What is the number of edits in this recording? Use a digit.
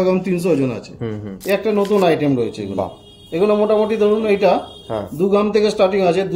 1